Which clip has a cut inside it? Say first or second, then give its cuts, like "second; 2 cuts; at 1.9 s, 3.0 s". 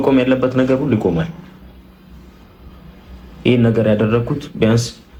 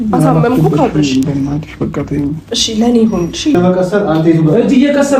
second; 1 cut; at 3.6 s